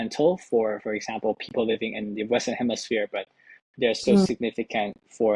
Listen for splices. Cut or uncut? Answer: uncut